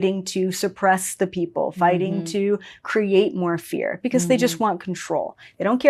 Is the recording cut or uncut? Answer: uncut